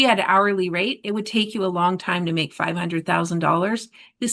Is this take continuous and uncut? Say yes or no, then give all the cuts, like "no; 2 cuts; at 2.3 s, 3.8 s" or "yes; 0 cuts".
yes; 0 cuts